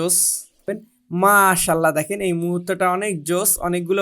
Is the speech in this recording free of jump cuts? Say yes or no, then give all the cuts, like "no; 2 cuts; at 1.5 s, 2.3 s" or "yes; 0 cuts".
no; 1 cut; at 0.9 s